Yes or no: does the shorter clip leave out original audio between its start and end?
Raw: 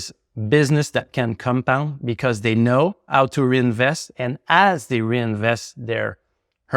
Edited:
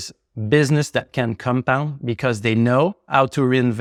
no